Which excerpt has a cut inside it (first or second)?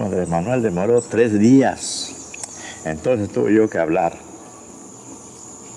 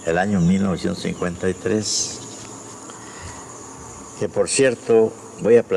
second